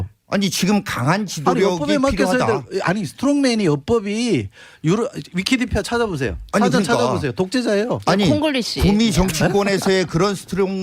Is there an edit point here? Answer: yes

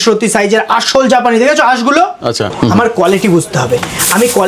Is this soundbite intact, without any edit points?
no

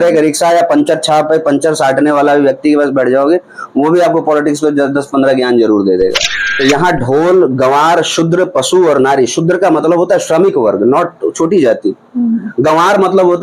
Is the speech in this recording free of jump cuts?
no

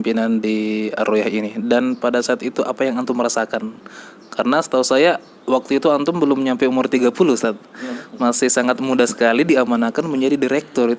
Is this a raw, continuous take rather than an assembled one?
yes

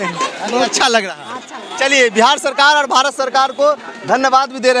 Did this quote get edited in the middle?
no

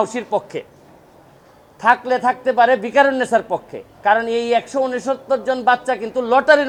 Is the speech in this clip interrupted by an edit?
no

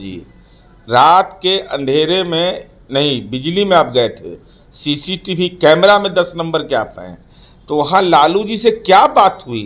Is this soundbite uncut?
yes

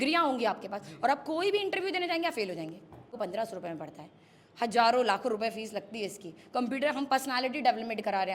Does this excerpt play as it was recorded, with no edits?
no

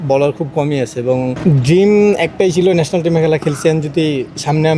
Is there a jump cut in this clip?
yes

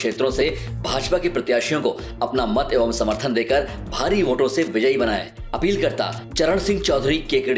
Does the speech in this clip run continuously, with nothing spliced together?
yes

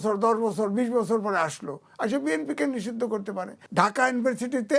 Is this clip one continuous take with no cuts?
no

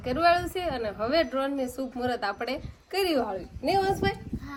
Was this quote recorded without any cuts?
yes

